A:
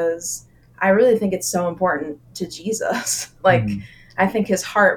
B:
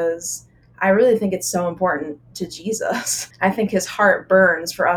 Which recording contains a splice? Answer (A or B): B